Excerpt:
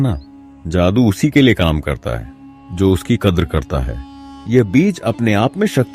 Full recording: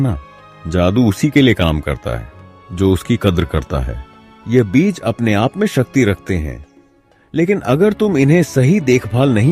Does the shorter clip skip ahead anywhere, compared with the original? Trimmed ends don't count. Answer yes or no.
no